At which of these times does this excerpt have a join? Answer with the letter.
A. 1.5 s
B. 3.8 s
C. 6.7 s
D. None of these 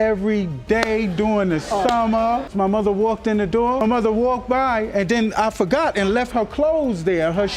B